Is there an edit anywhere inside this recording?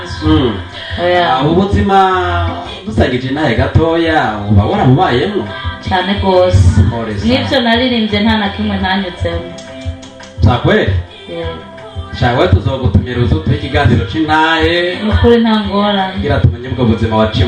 no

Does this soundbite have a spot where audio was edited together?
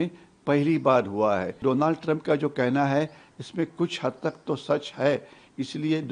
yes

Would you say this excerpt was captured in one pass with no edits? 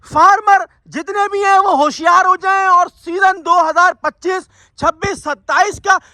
yes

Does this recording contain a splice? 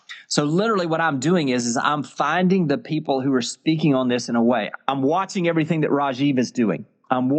yes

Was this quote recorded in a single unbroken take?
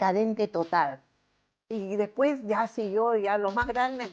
no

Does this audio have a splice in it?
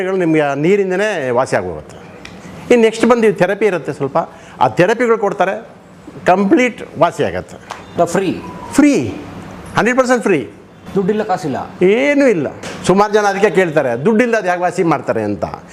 no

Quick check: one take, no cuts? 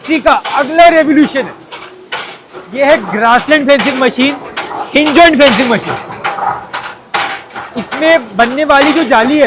yes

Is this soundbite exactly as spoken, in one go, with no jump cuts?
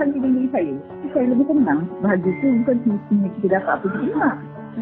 no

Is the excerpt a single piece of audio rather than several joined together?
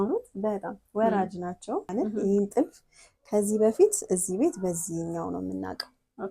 no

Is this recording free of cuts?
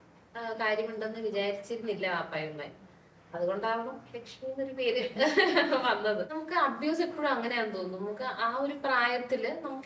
no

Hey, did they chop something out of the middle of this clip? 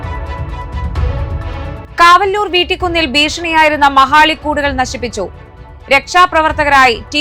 yes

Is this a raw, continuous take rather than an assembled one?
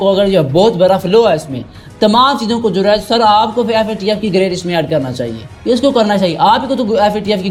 yes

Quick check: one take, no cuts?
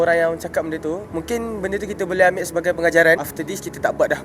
no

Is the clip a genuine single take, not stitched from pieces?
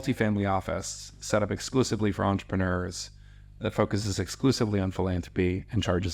yes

